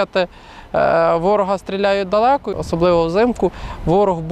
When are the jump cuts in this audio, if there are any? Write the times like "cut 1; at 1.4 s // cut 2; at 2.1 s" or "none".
cut 1; at 2.5 s

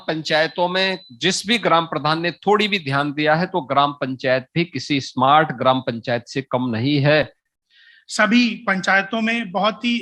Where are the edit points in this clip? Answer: cut 1; at 7.4 s

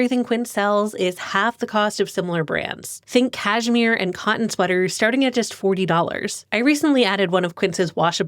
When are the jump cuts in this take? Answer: cut 1; at 3.0 s // cut 2; at 6.3 s

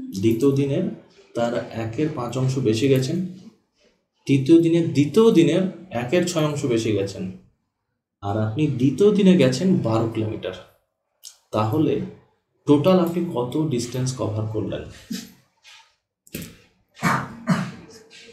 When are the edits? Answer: none

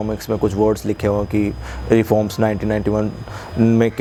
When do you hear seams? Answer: none

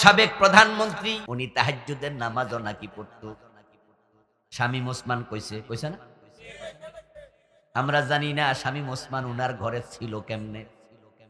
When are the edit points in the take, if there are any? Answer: cut 1; at 1.2 s

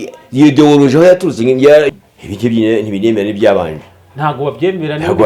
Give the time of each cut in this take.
cut 1; at 1.9 s

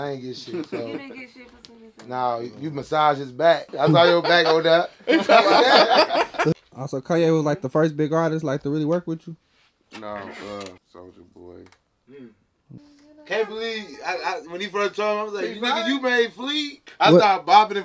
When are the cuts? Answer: cut 1; at 3.7 s // cut 2; at 6.5 s // cut 3; at 10.8 s // cut 4; at 12.8 s // cut 5; at 16.8 s

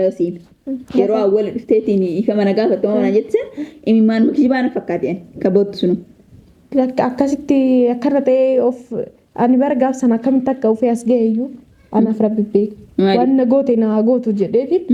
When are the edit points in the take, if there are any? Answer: none

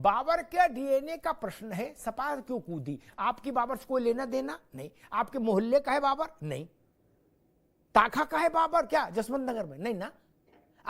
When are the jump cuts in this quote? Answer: cut 1; at 6.6 s

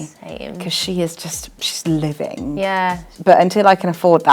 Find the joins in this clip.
cut 1; at 3.1 s

